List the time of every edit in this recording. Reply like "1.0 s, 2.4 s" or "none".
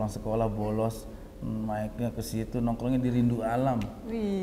none